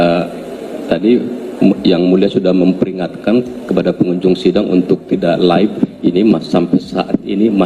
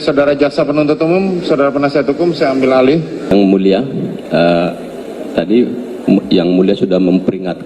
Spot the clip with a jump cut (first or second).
second